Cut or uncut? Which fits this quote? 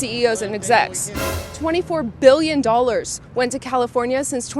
cut